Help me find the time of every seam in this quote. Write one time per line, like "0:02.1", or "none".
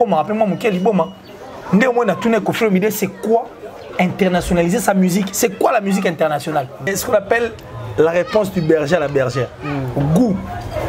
0:06.9